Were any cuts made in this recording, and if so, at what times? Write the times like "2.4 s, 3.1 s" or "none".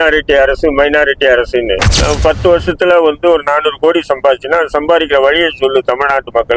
1.9 s